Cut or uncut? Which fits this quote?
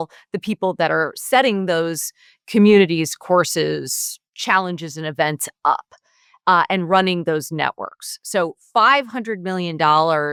uncut